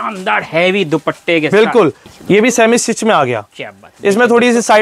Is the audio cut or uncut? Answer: cut